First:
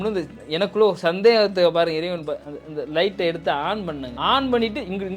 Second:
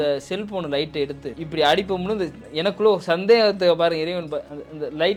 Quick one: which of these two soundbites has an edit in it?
first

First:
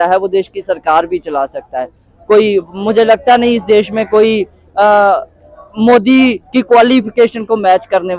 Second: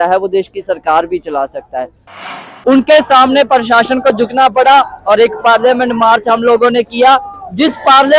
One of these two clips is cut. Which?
second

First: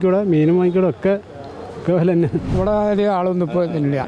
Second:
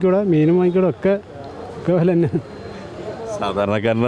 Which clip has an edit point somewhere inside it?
first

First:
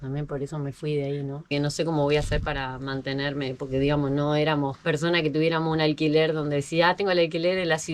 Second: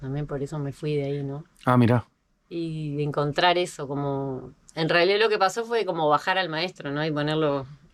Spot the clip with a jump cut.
first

